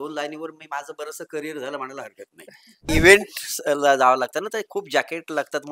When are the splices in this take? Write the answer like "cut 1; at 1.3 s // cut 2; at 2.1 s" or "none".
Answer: cut 1; at 2.9 s